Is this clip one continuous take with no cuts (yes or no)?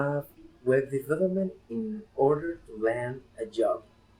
no